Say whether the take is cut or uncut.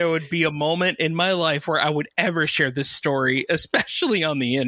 uncut